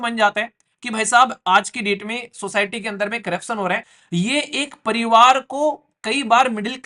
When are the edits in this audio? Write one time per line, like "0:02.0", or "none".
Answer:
0:03.9